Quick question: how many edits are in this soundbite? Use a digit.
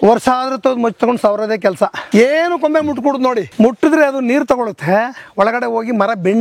2